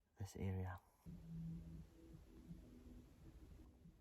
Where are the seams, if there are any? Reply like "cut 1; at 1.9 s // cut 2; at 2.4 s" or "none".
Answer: cut 1; at 0.9 s